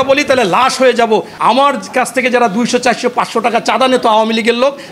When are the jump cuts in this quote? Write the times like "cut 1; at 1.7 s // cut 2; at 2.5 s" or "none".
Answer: cut 1; at 1.3 s

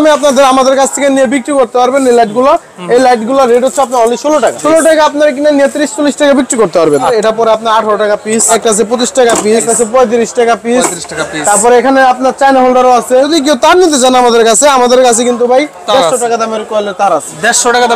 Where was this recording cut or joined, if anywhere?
cut 1; at 4.6 s // cut 2; at 7.1 s // cut 3; at 8.6 s // cut 4; at 9.6 s // cut 5; at 13.3 s

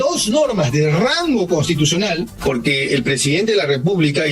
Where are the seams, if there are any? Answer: cut 1; at 2.3 s

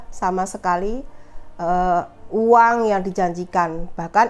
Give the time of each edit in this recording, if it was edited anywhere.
none

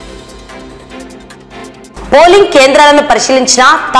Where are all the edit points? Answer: cut 1; at 1.9 s

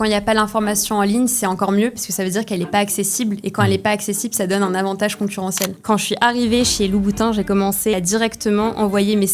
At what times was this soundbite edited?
cut 1; at 5.8 s // cut 2; at 7.9 s

